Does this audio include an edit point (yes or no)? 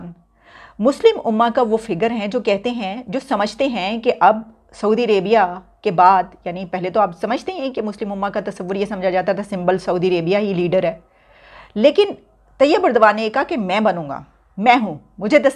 no